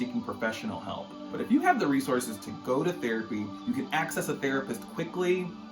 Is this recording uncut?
no; 1 cut; at 1.2 s

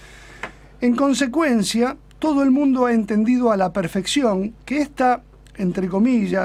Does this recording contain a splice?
no; 0 cuts

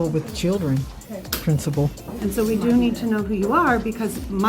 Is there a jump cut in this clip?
yes; 1 cut; at 2.1 s

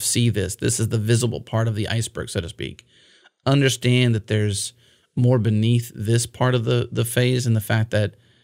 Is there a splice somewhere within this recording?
no; 0 cuts

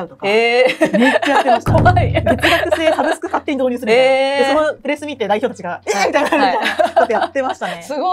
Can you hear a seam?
no; 0 cuts

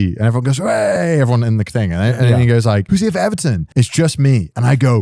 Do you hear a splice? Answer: yes; 2 cuts; at 2.8 s, 3.6 s

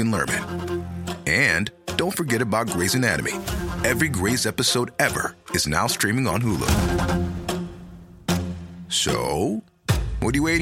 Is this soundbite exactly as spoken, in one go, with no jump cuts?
yes; 0 cuts

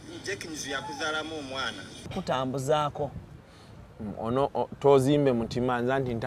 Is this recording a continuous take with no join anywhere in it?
no; 1 cut; at 1.9 s

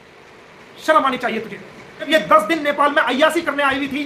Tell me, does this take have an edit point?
yes; 1 cut; at 2.1 s

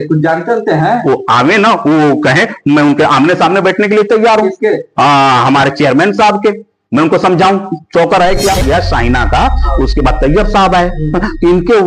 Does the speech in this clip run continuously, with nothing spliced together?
no; 1 cut; at 8.6 s

